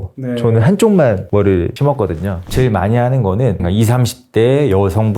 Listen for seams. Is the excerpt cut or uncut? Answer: cut